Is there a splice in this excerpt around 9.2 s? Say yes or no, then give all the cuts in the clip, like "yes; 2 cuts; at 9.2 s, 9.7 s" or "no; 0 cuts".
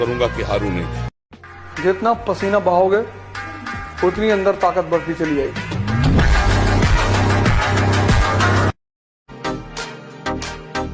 no; 1 cut; at 1.3 s